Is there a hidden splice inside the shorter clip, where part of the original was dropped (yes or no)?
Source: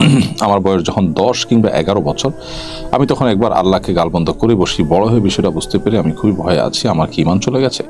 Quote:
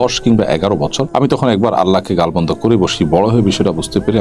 yes